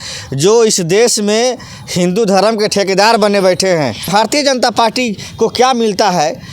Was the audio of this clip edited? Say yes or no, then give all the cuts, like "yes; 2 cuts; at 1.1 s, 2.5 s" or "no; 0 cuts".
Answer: yes; 1 cut; at 4.0 s